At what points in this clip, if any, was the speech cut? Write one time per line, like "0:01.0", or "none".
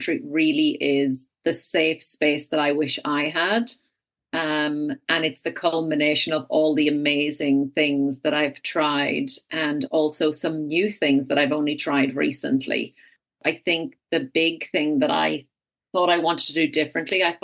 0:13.4